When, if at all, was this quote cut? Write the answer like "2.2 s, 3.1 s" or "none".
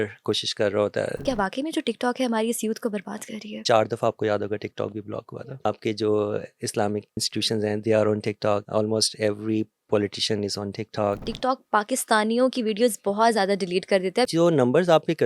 1.2 s, 3.6 s, 5.3 s, 7.2 s, 8.7 s, 11.3 s, 14.3 s

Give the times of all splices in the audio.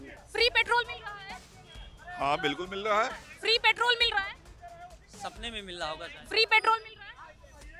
none

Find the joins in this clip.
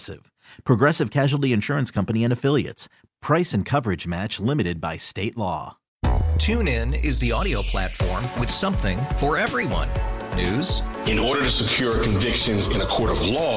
5.8 s

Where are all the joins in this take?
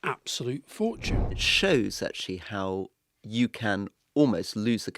1.4 s

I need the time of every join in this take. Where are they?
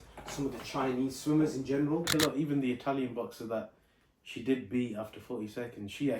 2.1 s

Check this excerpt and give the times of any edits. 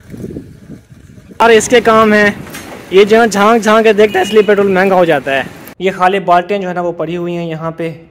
1.4 s, 5.6 s

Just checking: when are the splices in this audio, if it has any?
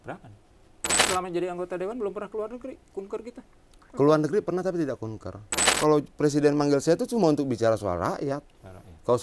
1.1 s, 5.7 s

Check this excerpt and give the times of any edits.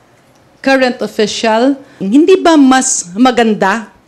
2.0 s

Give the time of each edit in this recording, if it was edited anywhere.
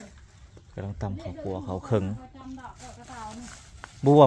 none

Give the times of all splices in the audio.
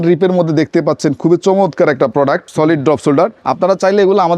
2.5 s, 3.4 s

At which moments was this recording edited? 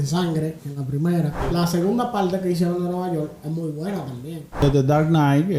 1.4 s, 4.6 s

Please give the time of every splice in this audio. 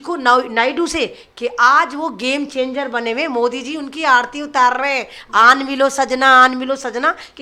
none

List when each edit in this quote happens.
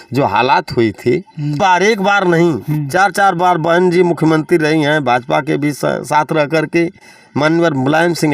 1.6 s

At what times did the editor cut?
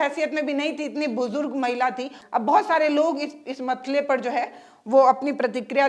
2.2 s

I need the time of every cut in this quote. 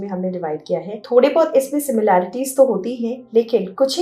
1.0 s

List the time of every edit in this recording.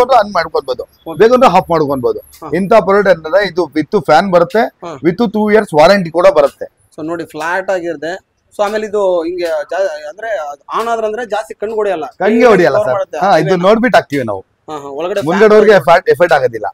none

